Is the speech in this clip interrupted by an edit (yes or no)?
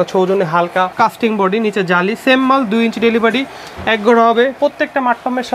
yes